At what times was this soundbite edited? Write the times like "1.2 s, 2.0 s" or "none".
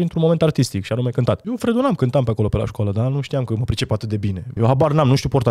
1.5 s, 4.5 s